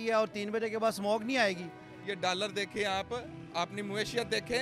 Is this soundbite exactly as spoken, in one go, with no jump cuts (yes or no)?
no